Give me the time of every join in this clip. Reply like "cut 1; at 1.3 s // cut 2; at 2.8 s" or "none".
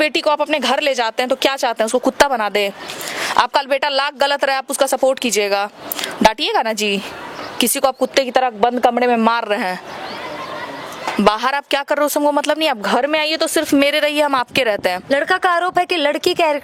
none